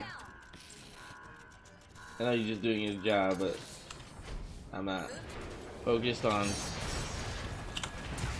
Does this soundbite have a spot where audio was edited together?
yes; 1 cut; at 5.3 s

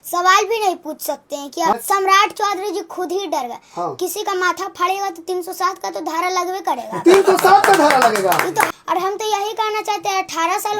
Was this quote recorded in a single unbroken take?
no; 2 cuts; at 1.7 s, 8.7 s

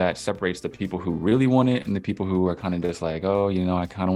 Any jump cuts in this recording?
no; 0 cuts

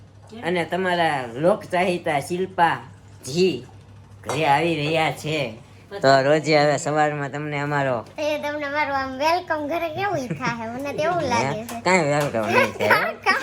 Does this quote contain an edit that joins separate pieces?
no; 0 cuts

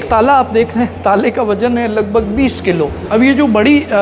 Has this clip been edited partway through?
yes; 1 cut; at 3.0 s

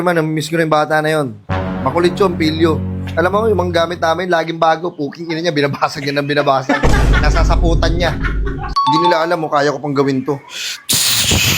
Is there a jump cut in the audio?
yes; 1 cut; at 8.6 s

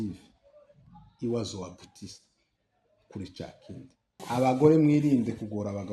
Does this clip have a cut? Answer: yes; 1 cut; at 4.2 s

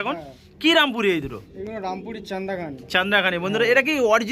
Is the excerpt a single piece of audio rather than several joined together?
yes; 0 cuts

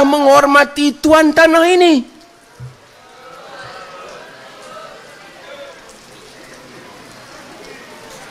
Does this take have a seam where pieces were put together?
no; 0 cuts

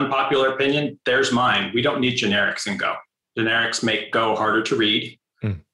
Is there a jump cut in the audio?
yes; 1 cut; at 3.1 s

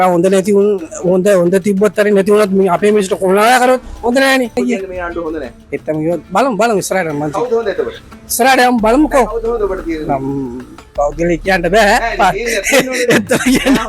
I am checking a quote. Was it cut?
yes; 1 cut; at 4.5 s

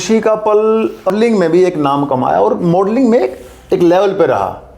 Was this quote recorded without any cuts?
no; 1 cut; at 1.1 s

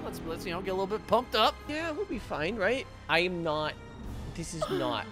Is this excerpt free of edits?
no; 2 cuts; at 1.6 s, 3.0 s

